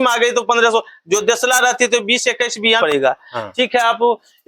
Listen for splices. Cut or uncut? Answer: cut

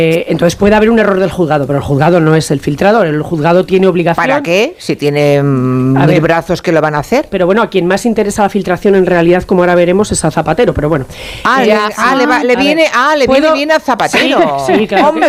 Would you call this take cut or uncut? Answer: uncut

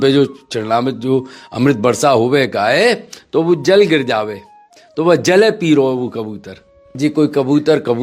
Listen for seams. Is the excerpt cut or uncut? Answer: cut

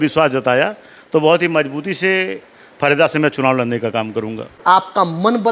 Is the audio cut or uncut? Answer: cut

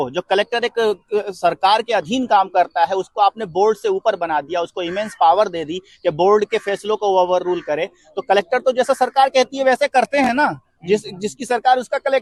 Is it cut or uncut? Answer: uncut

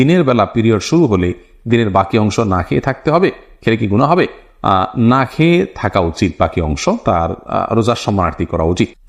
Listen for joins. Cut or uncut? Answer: uncut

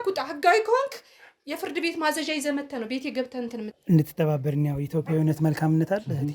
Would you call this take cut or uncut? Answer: cut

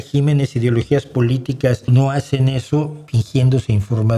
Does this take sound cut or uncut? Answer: cut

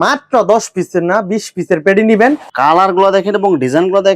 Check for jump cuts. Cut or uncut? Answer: cut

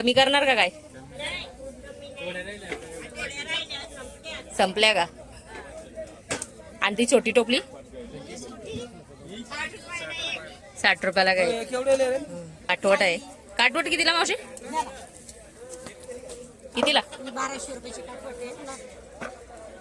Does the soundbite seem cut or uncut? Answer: cut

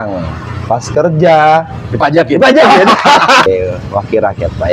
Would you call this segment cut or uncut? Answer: cut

